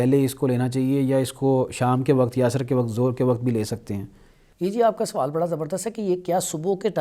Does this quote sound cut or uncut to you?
uncut